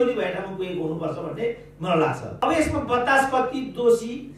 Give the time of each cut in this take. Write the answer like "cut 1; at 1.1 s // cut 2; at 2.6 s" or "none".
cut 1; at 2.3 s